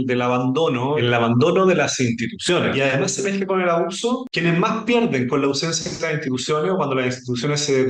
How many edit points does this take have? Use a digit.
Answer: 3